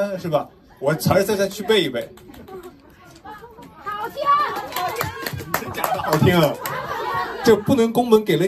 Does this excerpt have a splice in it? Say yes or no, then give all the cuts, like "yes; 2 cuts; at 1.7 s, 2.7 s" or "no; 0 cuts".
no; 0 cuts